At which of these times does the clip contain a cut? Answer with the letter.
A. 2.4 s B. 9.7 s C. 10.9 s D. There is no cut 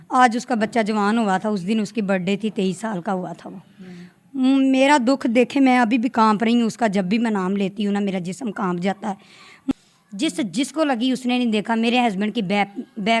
B